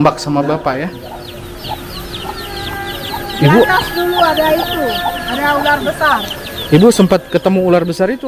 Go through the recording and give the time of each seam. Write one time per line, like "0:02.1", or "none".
0:01.1